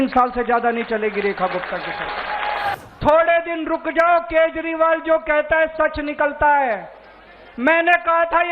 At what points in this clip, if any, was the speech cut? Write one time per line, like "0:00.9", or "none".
0:02.8